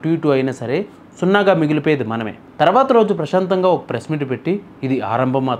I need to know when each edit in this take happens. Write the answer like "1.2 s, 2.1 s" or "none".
2.4 s